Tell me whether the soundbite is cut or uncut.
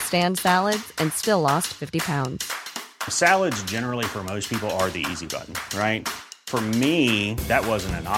uncut